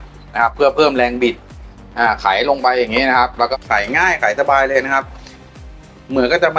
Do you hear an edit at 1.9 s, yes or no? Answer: no